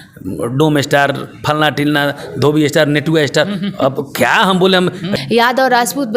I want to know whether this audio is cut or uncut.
cut